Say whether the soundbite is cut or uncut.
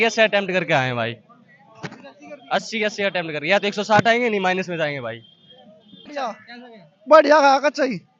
cut